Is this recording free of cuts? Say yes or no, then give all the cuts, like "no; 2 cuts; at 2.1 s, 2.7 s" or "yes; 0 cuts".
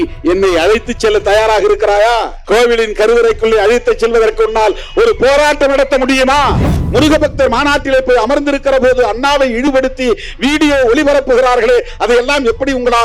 no; 2 cuts; at 2.3 s, 6.7 s